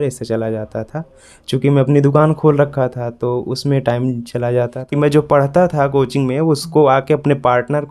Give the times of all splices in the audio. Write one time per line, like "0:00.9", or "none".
0:04.8

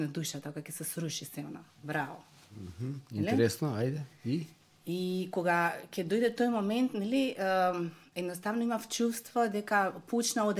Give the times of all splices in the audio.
none

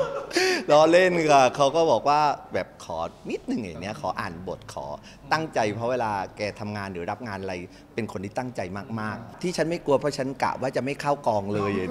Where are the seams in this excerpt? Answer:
0:09.3

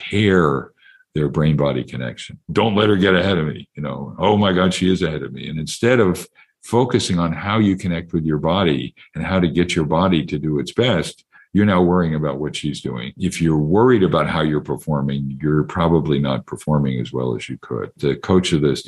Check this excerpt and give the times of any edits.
0:02.5
0:13.1
0:18.0

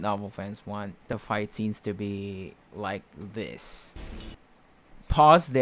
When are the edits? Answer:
0:01.1
0:03.9

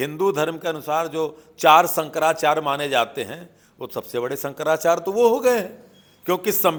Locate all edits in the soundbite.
none

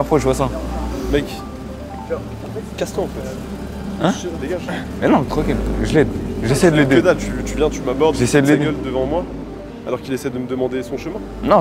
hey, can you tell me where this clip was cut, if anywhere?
none

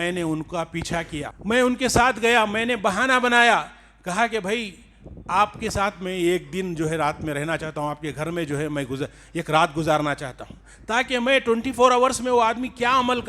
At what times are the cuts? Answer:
0:01.3

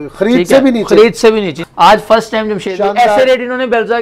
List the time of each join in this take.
0:01.5

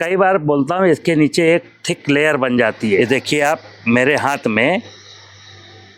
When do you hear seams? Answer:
0:03.0

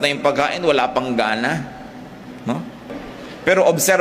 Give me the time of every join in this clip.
0:02.8

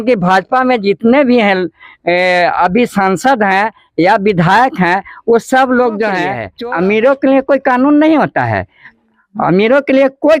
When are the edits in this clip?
0:06.4

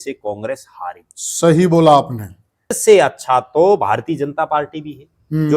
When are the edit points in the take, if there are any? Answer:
0:02.7

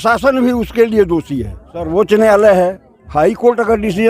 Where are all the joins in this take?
0:01.9

